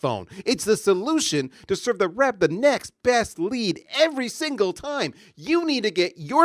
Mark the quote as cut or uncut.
uncut